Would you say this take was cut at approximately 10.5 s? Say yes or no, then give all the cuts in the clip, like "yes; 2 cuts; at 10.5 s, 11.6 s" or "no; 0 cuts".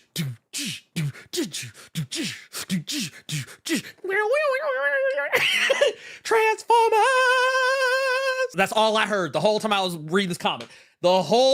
no; 1 cut; at 8.5 s